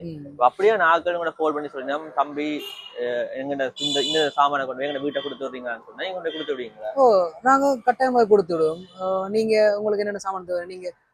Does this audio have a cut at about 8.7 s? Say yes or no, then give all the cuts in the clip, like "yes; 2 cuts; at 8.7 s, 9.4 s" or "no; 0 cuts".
no; 0 cuts